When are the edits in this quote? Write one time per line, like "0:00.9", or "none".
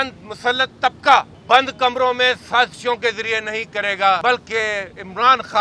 0:01.4
0:04.2